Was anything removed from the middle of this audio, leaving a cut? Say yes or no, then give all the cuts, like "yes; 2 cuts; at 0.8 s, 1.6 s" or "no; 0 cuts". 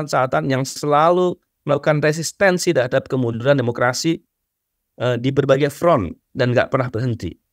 no; 0 cuts